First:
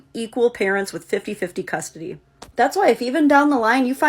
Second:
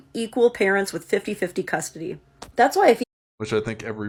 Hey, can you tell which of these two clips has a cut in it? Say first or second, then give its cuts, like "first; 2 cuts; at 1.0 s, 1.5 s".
first; 1 cut; at 3.0 s